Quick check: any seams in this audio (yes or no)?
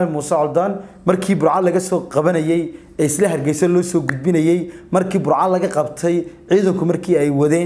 no